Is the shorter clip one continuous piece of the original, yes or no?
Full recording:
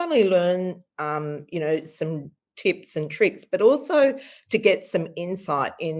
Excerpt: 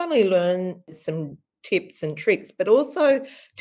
no